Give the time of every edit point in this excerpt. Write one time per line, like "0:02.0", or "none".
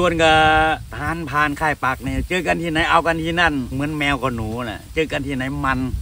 0:00.9
0:03.7

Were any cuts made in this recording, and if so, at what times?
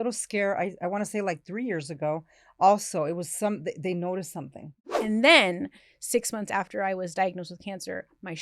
0:04.7

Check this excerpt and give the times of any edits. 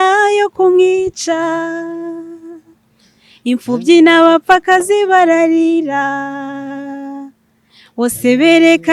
none

